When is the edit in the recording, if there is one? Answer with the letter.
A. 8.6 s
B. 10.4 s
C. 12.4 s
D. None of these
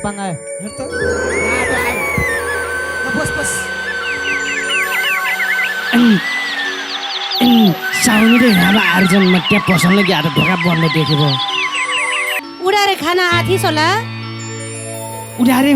C